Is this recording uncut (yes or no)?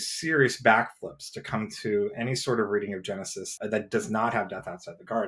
no